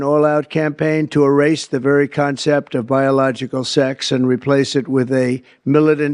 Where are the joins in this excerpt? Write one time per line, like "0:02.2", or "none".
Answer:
none